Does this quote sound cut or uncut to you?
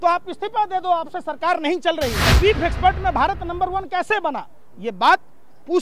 cut